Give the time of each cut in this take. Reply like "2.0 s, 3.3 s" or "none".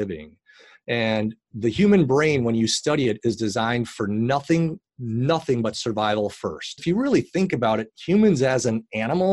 6.8 s